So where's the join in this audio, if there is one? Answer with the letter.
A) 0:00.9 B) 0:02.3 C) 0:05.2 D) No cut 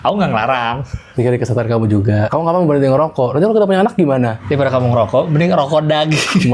B